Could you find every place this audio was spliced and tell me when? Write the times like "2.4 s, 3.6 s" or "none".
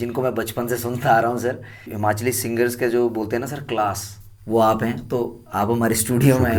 none